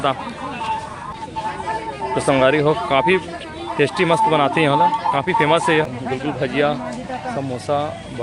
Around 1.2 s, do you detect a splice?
yes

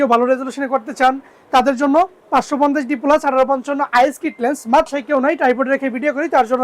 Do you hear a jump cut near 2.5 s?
no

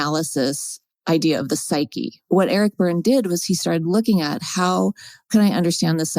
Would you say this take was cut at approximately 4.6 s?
no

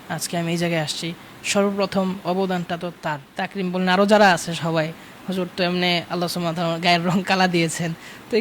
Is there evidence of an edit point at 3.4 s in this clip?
yes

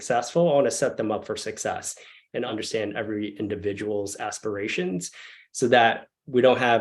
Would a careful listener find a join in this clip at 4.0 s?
no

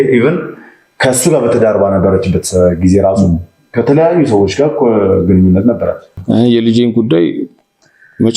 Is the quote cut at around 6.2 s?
yes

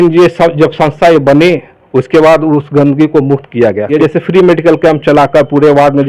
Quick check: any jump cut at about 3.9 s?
yes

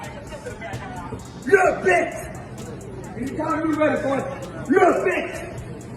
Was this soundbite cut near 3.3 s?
yes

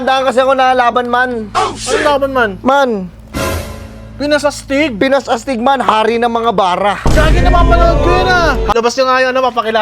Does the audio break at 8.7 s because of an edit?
yes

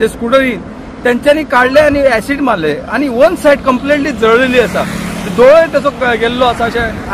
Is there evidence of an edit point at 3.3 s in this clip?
no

